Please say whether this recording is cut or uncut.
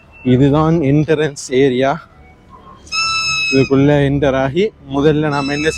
uncut